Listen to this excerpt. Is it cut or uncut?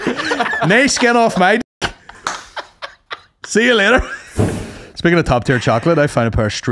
cut